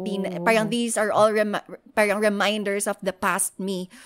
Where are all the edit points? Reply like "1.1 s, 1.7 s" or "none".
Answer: none